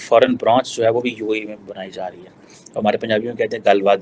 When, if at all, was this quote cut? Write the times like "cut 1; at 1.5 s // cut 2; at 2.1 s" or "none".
cut 1; at 2.4 s